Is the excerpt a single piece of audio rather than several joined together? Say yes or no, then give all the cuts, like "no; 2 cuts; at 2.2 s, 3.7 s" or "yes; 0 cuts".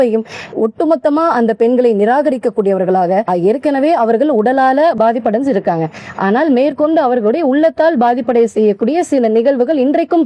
no; 1 cut; at 3.3 s